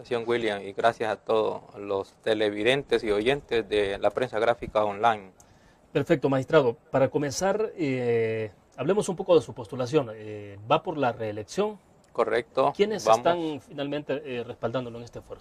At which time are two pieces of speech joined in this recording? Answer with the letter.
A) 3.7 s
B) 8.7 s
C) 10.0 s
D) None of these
A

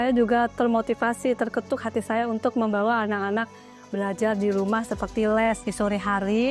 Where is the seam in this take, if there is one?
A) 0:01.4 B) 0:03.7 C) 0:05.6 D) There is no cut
C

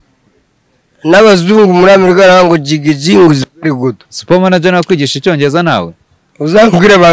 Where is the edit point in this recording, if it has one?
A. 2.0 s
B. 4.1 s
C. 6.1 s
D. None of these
B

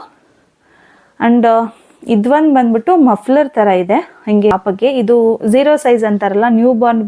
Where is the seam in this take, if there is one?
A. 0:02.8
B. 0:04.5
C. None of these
B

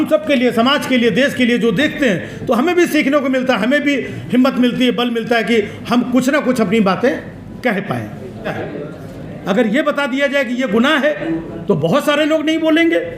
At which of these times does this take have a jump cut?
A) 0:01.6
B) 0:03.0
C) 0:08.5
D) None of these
C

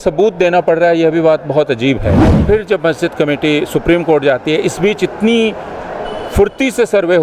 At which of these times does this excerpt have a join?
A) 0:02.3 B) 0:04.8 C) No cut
A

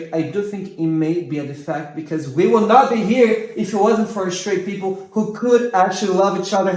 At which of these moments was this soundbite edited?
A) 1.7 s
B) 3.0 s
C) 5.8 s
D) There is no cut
D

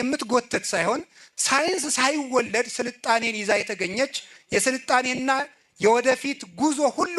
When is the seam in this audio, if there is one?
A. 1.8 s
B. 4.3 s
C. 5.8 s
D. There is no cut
D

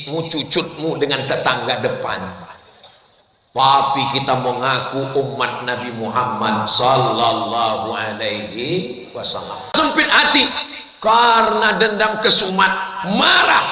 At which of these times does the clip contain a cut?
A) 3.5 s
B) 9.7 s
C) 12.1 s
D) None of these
B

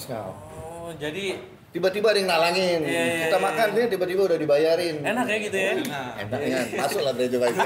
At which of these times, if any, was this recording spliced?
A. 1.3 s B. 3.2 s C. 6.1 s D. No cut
D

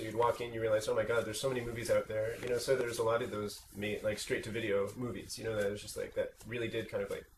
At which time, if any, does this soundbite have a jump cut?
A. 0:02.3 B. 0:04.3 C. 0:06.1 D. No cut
C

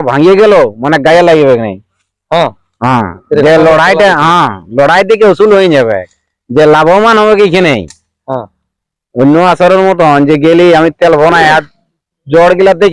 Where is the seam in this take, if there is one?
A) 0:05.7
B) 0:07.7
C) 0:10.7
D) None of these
D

